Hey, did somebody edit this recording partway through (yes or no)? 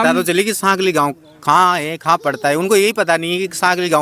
no